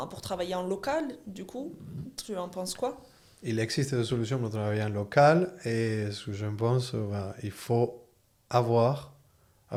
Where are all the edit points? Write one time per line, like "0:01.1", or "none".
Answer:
none